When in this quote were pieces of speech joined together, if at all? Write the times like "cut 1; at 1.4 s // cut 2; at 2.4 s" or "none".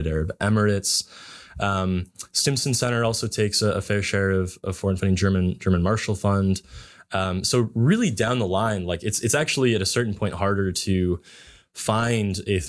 none